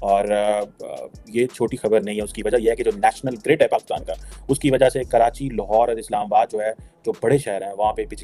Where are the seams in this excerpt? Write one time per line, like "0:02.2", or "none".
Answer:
none

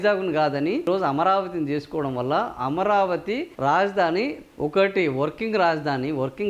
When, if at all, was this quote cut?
0:00.9
0:04.4

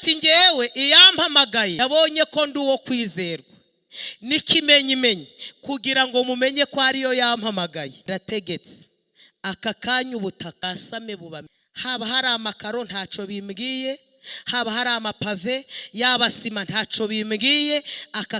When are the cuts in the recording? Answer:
0:01.8
0:08.0
0:10.6
0:11.6

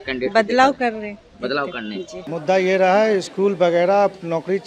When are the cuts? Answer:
0:02.2

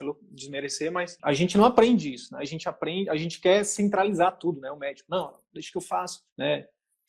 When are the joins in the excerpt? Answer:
0:01.1

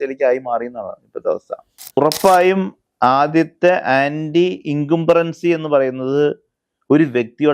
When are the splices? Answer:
0:02.0

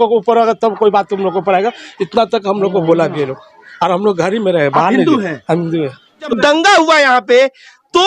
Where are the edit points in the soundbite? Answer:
0:06.3

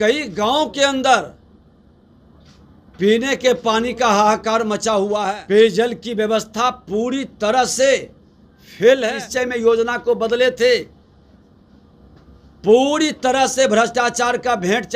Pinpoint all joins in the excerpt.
0:05.4
0:09.1

